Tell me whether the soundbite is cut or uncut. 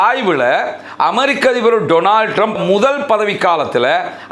cut